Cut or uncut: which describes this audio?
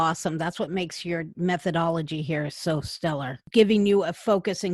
cut